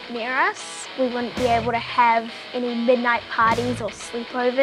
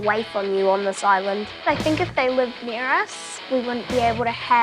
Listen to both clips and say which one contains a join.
second; 1 cut; at 1.6 s

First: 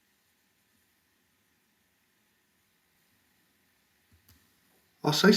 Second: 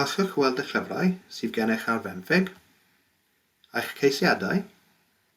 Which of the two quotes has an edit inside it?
first; 1 cut; at 3.0 s

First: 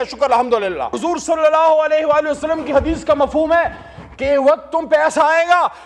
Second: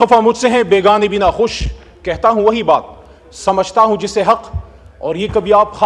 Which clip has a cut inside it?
first; 1 cut; at 1.0 s

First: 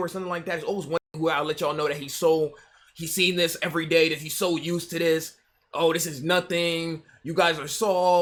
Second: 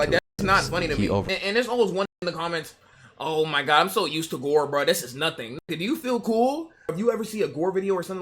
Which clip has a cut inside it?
second; 2 cuts; at 1.3 s, 7.0 s

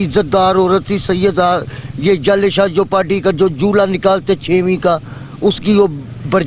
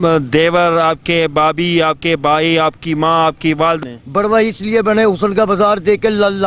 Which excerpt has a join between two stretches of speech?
second; 1 cut; at 3.8 s

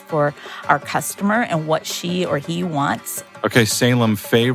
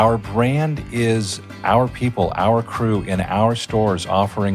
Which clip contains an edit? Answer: first; 1 cut; at 3.2 s

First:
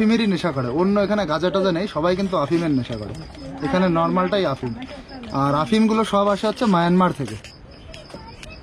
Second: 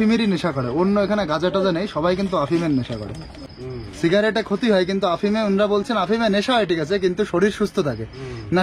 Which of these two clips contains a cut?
second; 1 cut; at 3.5 s

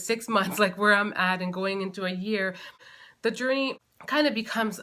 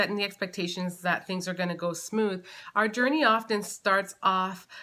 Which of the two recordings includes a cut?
first; 2 cuts; at 2.9 s, 3.9 s

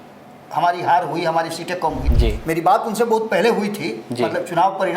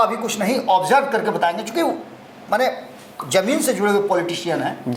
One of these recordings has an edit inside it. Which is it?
first; 1 cut; at 2.1 s

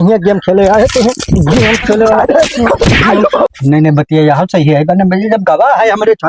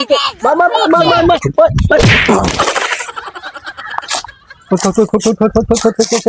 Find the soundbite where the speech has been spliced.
first; 1 cut; at 3.5 s

